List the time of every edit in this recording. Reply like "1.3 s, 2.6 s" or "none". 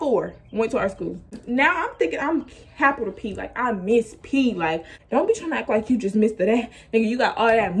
1.3 s, 4.9 s